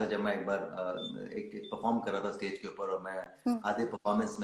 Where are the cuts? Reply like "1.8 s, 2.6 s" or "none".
none